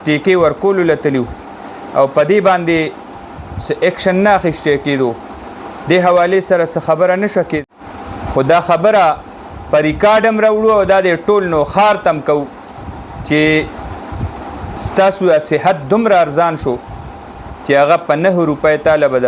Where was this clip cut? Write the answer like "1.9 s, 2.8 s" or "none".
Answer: 7.6 s